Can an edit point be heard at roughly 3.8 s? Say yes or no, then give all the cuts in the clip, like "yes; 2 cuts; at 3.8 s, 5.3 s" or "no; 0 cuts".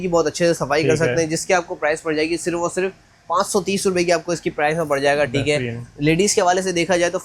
no; 0 cuts